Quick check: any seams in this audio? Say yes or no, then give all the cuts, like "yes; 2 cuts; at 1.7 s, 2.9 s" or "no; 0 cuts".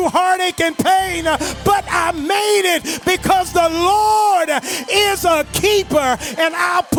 no; 0 cuts